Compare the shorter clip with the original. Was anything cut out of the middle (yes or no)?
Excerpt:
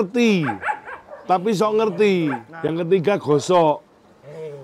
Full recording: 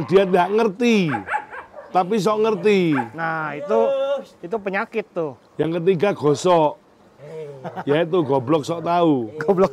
yes